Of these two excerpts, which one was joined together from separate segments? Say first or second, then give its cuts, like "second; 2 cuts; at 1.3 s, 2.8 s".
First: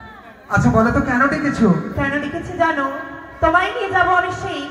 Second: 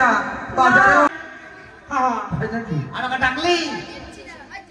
second; 1 cut; at 1.1 s